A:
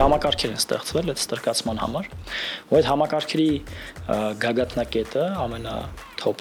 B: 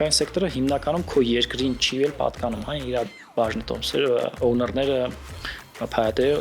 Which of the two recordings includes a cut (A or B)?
B